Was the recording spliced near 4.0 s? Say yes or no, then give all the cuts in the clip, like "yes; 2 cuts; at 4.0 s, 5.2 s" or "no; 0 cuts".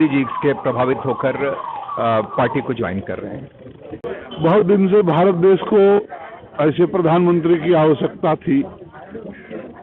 yes; 1 cut; at 4.0 s